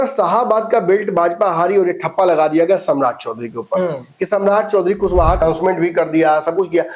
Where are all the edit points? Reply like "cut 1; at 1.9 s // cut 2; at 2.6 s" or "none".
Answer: cut 1; at 5.4 s